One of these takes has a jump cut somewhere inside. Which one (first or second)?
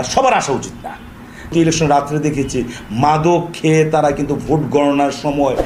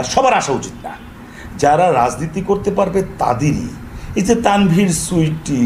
first